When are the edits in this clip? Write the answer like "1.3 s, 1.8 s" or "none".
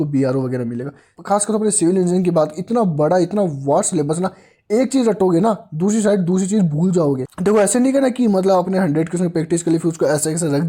1.1 s, 7.3 s